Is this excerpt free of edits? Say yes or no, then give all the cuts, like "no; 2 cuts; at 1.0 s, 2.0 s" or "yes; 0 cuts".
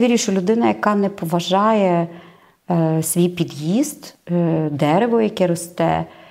yes; 0 cuts